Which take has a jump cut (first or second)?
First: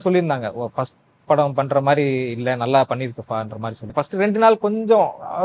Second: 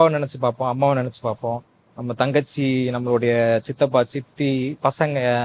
first